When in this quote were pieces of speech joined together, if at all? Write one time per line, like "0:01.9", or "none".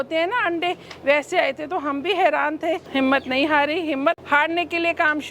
0:02.8
0:04.2